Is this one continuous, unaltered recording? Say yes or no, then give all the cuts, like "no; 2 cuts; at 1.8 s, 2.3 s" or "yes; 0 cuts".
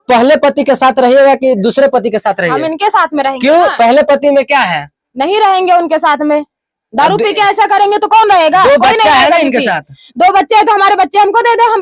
yes; 0 cuts